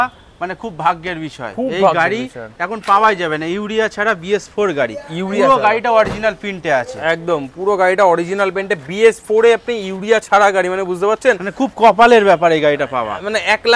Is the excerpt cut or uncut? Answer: uncut